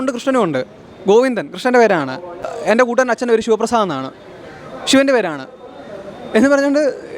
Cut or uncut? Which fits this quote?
uncut